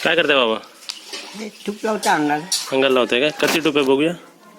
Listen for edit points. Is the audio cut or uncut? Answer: uncut